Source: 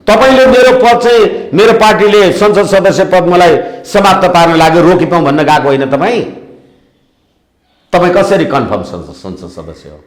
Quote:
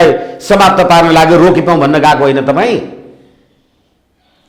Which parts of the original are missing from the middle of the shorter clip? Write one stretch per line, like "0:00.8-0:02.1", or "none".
none